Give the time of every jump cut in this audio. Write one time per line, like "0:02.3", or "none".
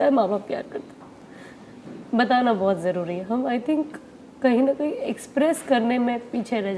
none